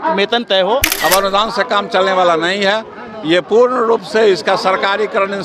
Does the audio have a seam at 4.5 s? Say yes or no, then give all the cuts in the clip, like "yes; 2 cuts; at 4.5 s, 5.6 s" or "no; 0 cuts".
no; 1 cut; at 0.9 s